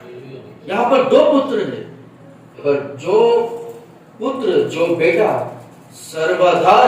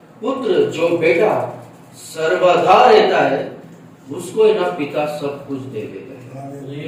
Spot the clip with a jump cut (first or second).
first